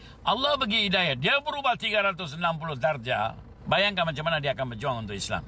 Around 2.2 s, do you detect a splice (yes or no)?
no